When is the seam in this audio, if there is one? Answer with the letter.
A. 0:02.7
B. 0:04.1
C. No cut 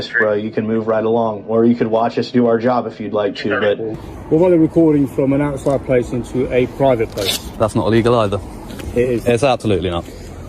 B